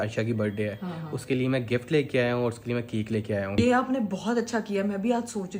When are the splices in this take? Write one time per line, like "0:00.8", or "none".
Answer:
0:03.6

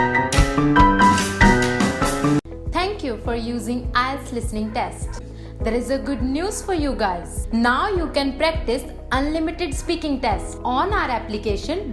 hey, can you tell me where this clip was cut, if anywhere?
0:02.4

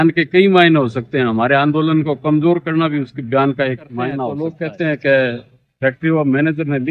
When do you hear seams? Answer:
0:04.4

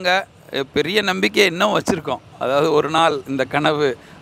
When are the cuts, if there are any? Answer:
none

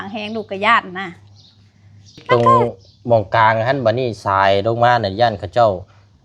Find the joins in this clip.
0:02.2

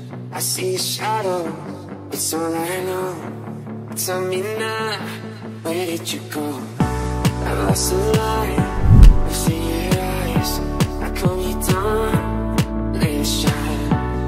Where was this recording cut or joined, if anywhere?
none

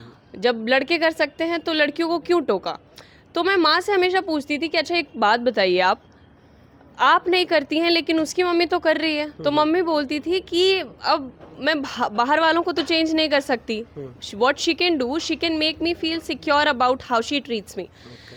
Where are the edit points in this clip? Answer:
none

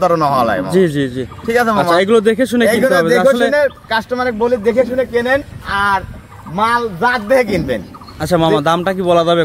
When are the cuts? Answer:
none

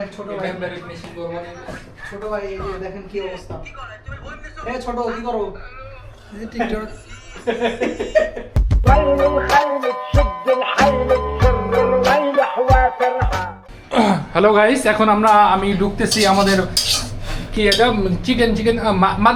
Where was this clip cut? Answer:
0:13.4

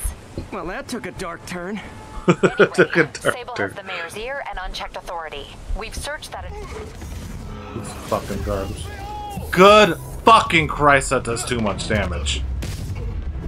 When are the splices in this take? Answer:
0:06.4

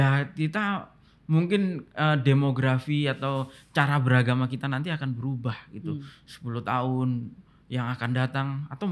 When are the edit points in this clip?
none

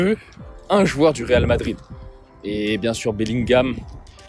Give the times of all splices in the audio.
none

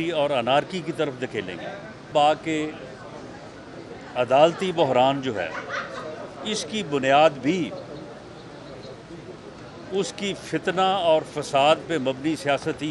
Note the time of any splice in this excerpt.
0:02.1

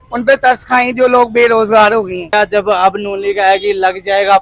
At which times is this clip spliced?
0:02.3

